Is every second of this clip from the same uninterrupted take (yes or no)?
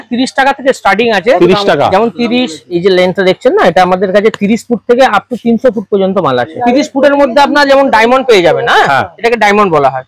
no